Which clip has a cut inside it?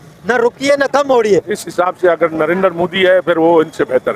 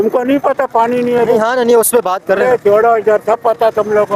first; 1 cut; at 1.6 s

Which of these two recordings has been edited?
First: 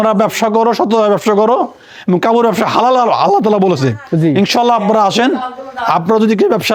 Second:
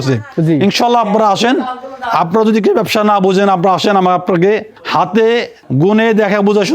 second; 2 cuts; at 4.8 s, 5.6 s

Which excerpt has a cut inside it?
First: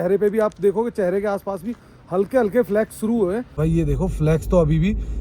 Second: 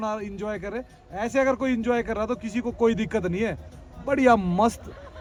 first; 1 cut; at 3.5 s

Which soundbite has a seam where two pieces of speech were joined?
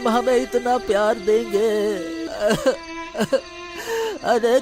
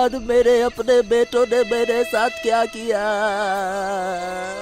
first; 1 cut; at 2.2 s

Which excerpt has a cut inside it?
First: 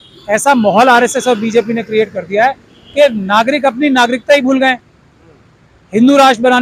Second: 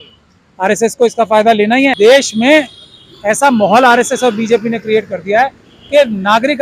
second; 1 cut; at 1.9 s

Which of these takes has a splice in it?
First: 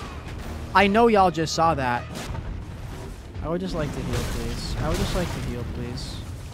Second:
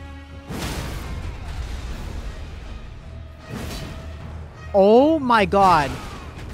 first; 1 cut; at 2.3 s

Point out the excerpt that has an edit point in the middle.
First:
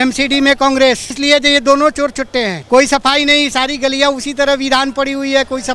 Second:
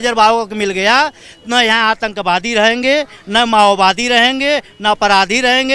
first; 2 cuts; at 1.1 s, 2.6 s

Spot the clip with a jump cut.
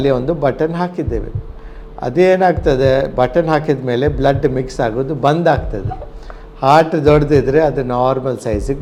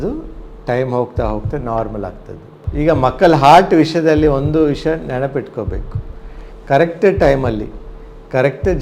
second; 1 cut; at 2.6 s

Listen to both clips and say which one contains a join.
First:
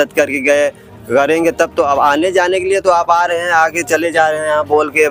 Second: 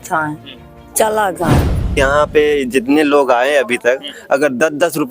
second; 1 cut; at 2.0 s

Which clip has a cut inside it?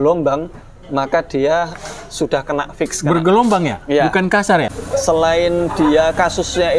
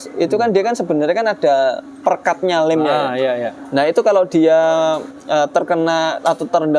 first; 1 cut; at 4.8 s

